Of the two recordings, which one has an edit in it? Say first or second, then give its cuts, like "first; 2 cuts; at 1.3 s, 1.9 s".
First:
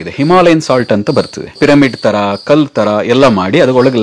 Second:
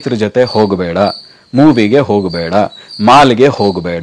first; 1 cut; at 1.5 s